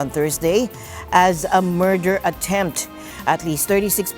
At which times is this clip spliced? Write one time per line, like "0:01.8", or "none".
0:03.1